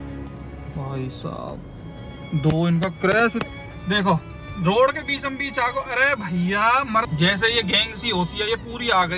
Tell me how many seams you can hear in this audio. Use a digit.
2